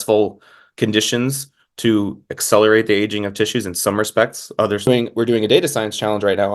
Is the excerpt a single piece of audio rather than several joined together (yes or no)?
no